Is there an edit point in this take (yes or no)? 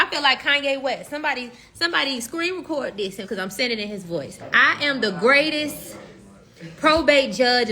yes